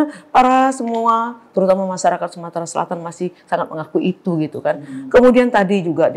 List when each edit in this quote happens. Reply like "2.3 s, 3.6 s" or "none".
none